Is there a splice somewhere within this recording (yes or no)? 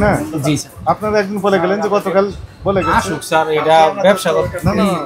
no